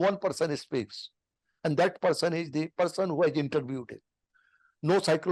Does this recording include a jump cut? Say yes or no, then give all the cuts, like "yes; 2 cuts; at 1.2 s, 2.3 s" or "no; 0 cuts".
no; 0 cuts